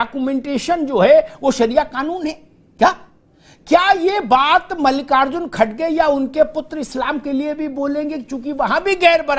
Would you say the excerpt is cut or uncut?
uncut